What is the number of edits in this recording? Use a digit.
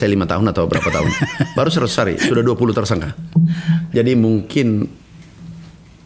0